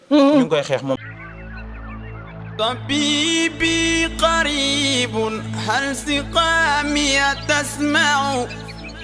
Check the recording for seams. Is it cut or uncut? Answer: cut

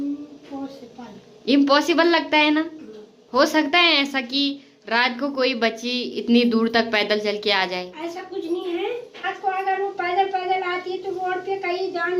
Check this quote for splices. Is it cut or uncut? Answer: uncut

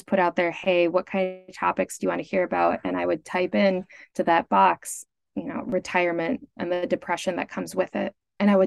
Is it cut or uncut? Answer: uncut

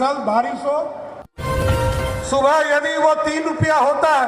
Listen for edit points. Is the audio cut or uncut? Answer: cut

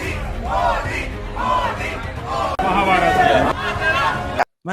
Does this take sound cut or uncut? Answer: uncut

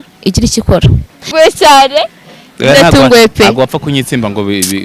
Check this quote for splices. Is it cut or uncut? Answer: cut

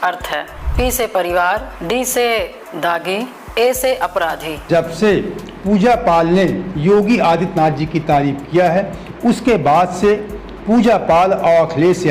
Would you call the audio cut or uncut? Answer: cut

